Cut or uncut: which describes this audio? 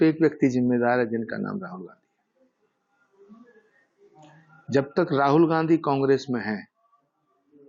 uncut